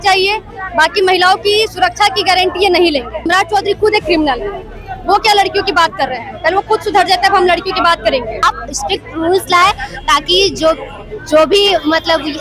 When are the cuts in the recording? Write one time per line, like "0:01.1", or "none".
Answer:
0:03.3
0:08.4